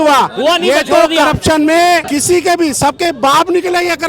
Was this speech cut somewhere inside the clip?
yes; 1 cut; at 2.1 s

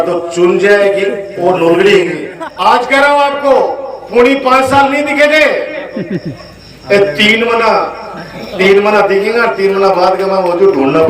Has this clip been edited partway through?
yes; 1 cut; at 2.2 s

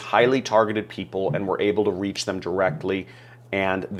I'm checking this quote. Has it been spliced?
no; 0 cuts

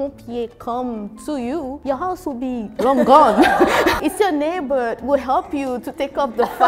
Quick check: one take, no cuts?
yes; 0 cuts

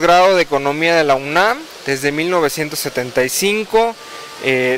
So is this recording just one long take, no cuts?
no; 1 cut; at 2.5 s

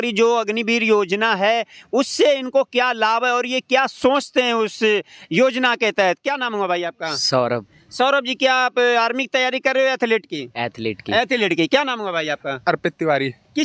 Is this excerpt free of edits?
yes; 0 cuts

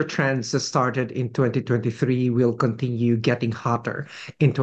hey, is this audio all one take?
yes; 0 cuts

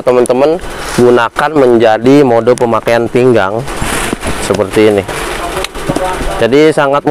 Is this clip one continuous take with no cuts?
yes; 0 cuts

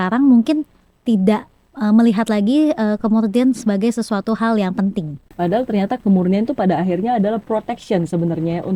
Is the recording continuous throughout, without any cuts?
yes; 0 cuts

